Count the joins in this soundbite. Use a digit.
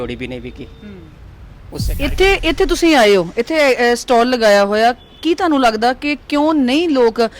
1